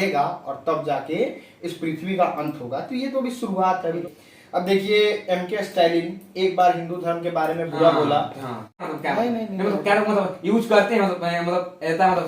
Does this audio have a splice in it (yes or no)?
yes